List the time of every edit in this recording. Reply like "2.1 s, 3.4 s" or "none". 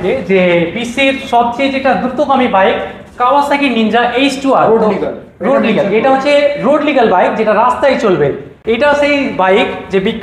none